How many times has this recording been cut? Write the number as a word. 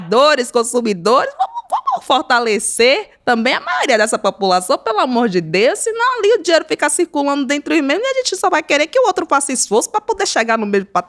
zero